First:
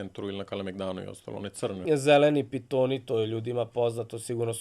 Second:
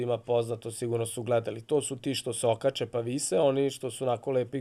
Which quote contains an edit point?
first; 1 cut; at 1.8 s

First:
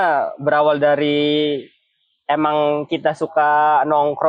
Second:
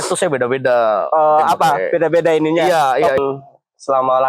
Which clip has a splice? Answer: second; 1 cut; at 3.2 s

